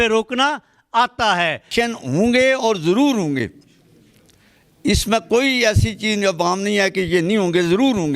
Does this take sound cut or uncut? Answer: cut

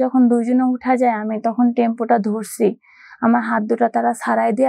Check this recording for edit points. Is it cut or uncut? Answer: uncut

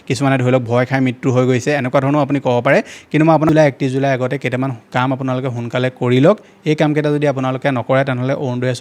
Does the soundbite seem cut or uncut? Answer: cut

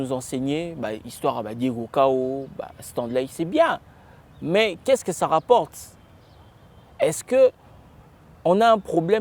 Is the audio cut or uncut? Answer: uncut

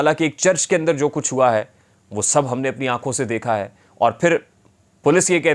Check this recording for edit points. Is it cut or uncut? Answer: uncut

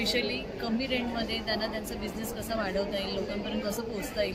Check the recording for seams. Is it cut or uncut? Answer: uncut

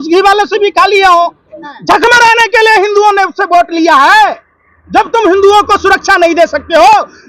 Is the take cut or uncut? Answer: cut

